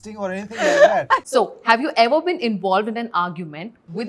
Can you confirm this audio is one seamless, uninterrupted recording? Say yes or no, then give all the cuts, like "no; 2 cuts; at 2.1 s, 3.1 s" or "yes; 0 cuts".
no; 1 cut; at 1.2 s